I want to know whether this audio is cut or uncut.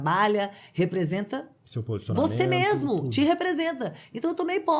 uncut